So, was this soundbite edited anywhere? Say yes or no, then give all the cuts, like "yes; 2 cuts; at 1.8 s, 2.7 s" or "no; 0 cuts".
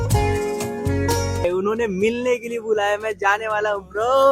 yes; 1 cut; at 1.4 s